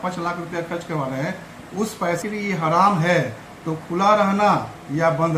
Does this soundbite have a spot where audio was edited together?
yes; 1 cut; at 2.2 s

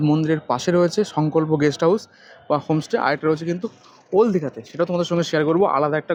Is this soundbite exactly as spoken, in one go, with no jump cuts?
yes; 0 cuts

